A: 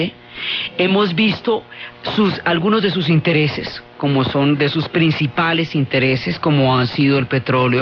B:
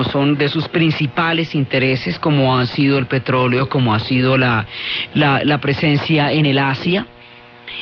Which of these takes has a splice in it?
A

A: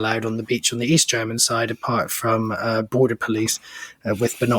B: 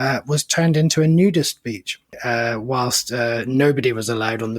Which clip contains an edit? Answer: B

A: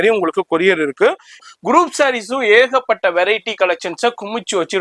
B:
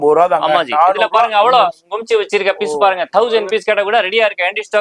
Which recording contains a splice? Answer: A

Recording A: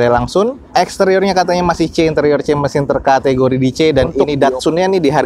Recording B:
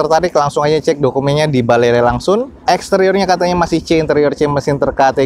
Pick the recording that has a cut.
A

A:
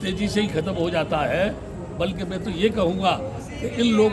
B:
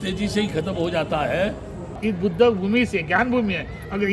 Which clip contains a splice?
B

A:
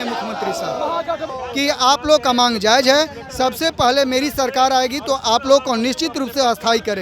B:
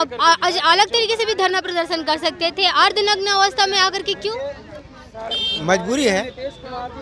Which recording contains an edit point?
A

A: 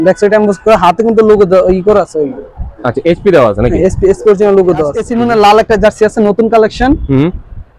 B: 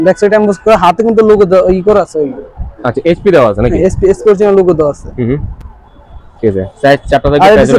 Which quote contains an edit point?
A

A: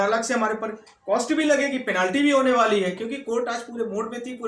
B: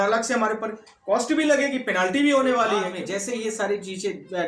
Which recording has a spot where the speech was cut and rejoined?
B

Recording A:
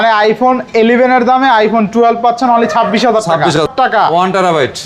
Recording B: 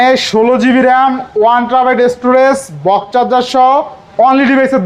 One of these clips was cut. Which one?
A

